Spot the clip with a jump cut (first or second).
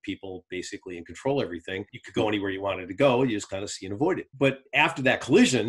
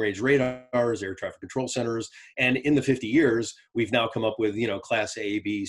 first